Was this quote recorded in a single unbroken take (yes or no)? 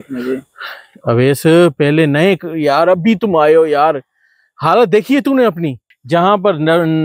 no